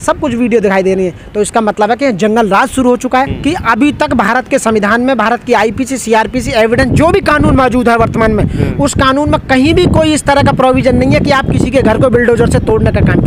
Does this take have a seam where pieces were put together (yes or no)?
yes